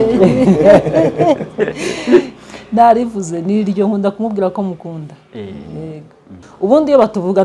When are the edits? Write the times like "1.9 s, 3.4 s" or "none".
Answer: 6.4 s